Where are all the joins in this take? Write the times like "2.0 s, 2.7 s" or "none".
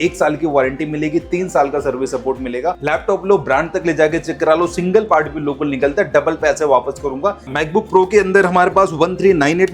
2.8 s, 7.5 s